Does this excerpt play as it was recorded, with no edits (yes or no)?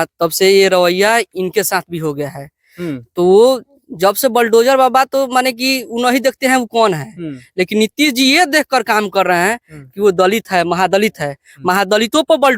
yes